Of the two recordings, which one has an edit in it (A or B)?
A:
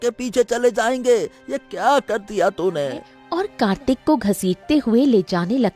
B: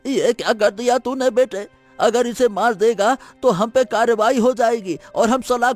A